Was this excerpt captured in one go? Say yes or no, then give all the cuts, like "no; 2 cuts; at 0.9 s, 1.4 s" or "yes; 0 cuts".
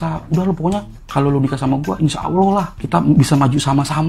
no; 2 cuts; at 1.0 s, 2.8 s